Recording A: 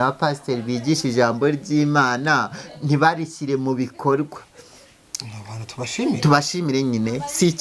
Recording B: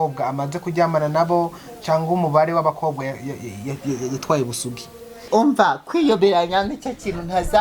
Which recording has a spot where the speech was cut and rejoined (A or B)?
B